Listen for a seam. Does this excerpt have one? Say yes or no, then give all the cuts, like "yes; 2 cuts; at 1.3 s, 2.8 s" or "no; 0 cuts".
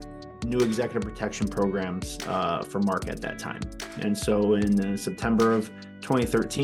no; 0 cuts